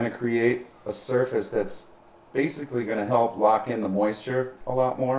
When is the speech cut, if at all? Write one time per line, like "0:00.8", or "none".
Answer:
none